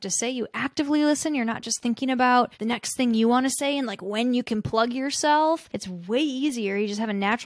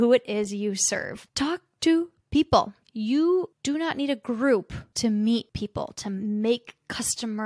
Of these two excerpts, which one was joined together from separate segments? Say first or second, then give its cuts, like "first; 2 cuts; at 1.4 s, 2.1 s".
second; 5 cuts; at 1.2 s, 2.8 s, 3.6 s, 4.8 s, 5.9 s